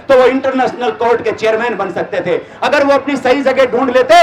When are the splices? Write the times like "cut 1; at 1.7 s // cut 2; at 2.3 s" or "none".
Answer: none